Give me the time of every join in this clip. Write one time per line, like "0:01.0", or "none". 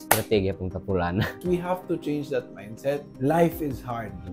0:01.4
0:03.1

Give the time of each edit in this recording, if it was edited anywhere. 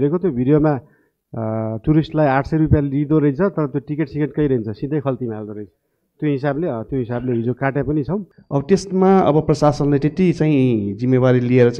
0:08.4

